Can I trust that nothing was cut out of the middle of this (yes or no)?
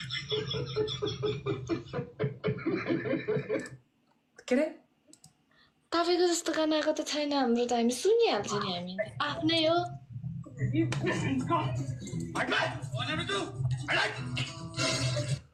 yes